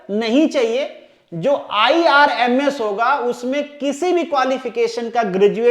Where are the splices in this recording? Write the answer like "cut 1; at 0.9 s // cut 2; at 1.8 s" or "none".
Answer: none